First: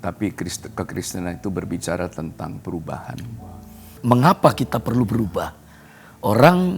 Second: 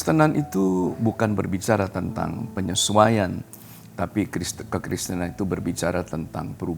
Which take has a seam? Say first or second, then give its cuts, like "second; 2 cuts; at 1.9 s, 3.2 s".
first; 1 cut; at 3.9 s